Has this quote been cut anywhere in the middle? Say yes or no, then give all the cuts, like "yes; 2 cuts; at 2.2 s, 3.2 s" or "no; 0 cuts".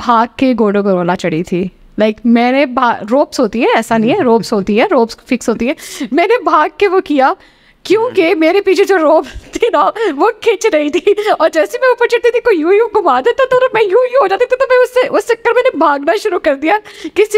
no; 0 cuts